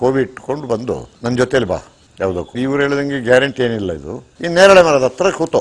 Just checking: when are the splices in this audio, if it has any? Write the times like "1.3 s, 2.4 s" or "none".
1.1 s